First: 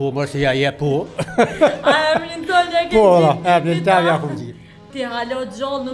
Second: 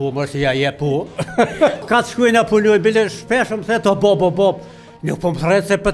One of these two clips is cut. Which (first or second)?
second